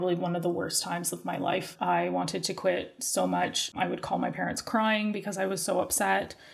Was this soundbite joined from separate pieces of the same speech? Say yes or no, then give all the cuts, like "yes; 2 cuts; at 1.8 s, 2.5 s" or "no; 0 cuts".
yes; 2 cuts; at 1.7 s, 3.7 s